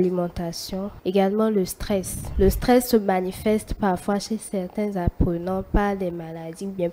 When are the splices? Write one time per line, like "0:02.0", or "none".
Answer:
0:01.0
0:02.2